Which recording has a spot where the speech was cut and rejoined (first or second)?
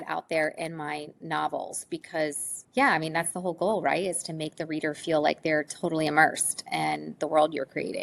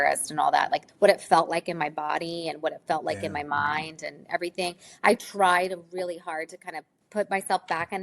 second